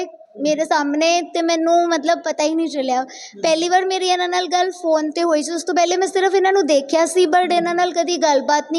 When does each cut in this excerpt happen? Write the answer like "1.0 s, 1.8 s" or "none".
none